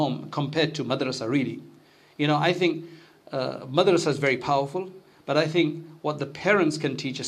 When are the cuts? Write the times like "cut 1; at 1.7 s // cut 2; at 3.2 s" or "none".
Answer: none